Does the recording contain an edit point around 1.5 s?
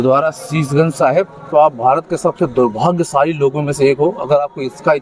yes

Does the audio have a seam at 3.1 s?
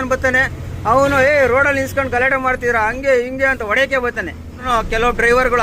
no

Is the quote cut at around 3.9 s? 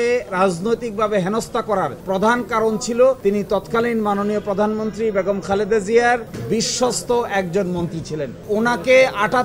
no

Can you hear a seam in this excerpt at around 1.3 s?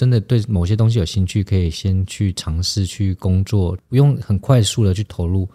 no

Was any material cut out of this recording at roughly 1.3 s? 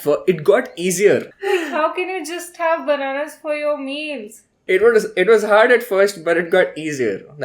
yes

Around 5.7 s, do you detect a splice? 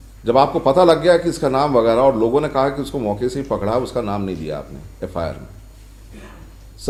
no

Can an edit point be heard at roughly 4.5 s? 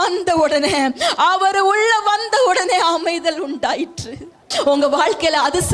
yes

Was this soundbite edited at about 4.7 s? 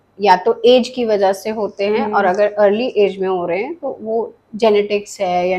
no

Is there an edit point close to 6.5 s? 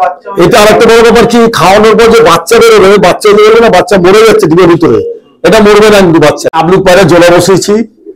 yes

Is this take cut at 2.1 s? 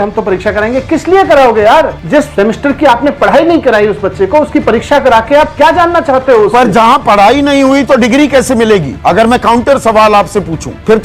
yes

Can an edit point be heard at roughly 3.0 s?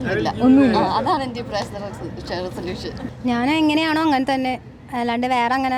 yes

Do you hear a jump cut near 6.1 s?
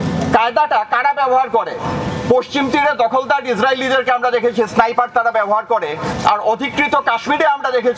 yes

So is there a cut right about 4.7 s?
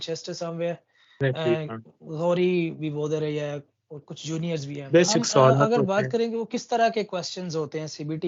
yes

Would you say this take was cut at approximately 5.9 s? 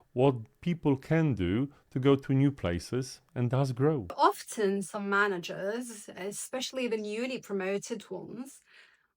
no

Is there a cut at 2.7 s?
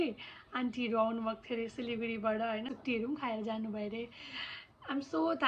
yes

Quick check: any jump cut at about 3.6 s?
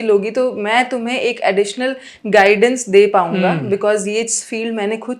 no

